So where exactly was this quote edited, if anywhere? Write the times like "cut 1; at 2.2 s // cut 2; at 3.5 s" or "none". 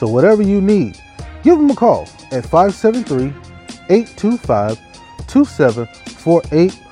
none